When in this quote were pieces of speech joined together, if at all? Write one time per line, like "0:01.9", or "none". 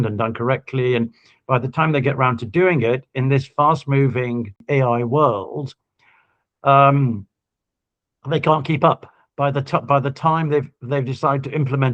0:04.6